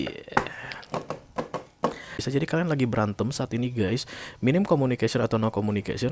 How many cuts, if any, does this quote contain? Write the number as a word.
one